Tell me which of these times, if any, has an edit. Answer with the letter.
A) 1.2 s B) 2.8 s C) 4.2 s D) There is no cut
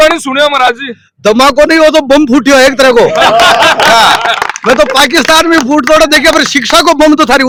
D